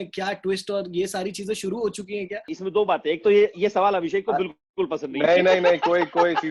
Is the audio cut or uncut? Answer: cut